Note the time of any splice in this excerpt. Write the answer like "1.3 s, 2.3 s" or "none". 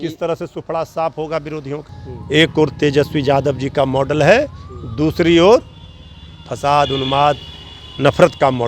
1.9 s